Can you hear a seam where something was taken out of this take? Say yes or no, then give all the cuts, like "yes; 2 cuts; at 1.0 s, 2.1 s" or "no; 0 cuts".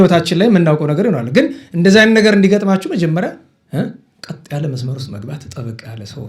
no; 0 cuts